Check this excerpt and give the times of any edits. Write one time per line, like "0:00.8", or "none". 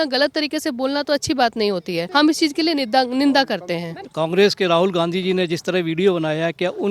0:02.0
0:04.0

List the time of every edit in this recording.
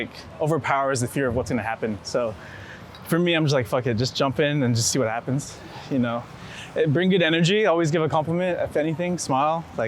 none

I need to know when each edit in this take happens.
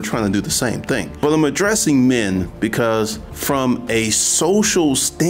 0:01.1
0:03.3

